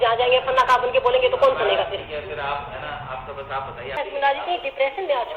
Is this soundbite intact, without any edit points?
no; 1 cut; at 4.0 s

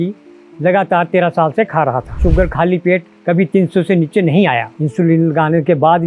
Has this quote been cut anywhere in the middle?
yes; 2 cuts; at 2.2 s, 4.8 s

